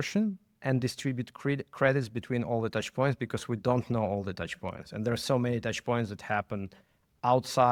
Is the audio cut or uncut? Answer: uncut